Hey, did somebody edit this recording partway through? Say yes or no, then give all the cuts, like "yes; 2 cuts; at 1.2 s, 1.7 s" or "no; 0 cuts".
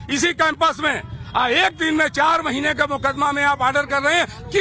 no; 0 cuts